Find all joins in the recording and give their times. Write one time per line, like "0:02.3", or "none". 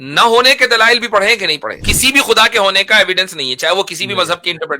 0:01.9